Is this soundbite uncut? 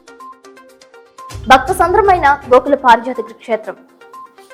yes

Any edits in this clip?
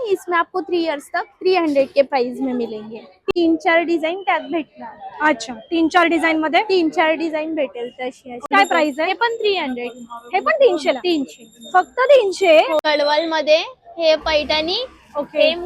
yes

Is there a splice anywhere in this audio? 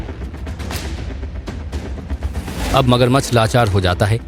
no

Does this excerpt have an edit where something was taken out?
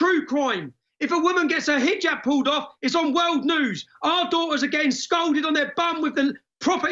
no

